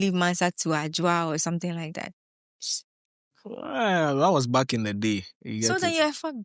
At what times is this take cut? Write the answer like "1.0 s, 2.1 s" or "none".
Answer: none